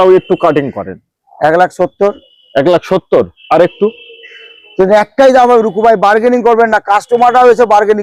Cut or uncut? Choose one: uncut